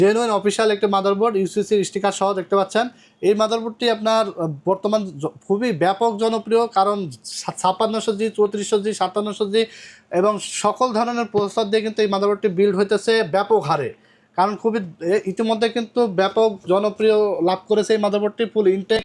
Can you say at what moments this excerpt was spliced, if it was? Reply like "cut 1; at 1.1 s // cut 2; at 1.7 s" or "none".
none